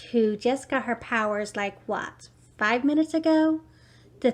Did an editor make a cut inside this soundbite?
no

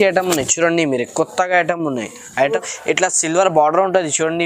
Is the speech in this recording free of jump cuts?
no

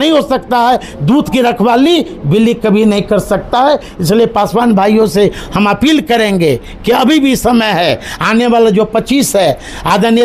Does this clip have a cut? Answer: no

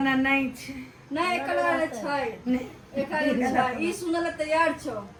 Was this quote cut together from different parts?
no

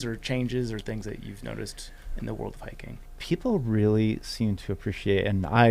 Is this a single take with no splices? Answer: no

